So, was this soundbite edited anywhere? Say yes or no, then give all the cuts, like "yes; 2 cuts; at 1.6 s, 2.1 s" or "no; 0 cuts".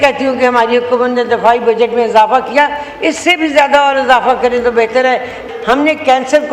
yes; 1 cut; at 5.5 s